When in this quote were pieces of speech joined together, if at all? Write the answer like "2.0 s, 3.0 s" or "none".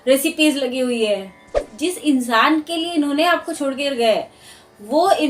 1.7 s